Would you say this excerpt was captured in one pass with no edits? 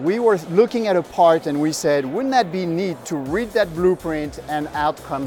no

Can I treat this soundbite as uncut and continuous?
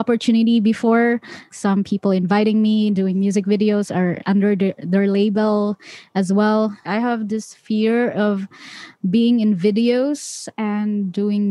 no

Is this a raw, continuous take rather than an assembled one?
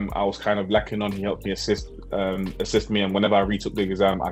yes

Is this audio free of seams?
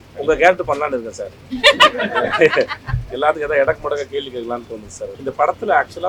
no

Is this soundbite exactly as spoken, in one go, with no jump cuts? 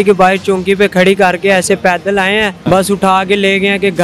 no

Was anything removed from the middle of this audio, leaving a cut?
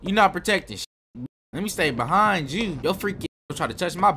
yes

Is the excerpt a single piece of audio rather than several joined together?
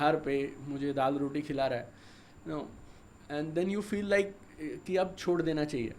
yes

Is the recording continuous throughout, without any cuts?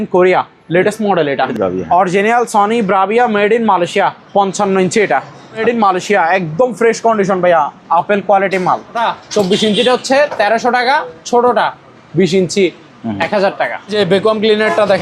no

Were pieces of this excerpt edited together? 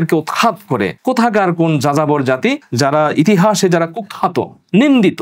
yes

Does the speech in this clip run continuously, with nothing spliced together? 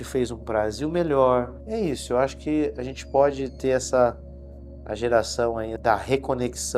no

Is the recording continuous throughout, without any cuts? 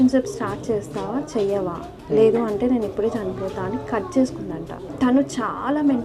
no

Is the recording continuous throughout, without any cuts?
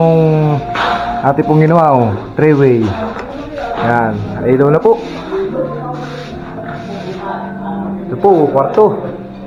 yes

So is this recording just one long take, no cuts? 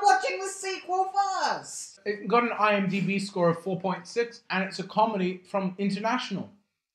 no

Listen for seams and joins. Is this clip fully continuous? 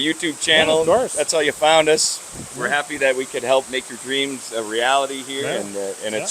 no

